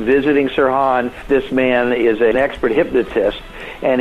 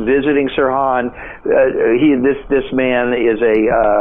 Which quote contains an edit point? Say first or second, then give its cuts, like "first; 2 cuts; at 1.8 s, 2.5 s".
first; 2 cuts; at 1.2 s, 2.3 s